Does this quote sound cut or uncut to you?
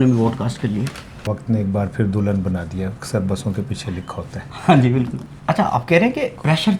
cut